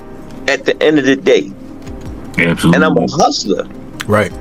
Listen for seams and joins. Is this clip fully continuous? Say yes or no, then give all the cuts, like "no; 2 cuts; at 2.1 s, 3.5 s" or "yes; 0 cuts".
yes; 0 cuts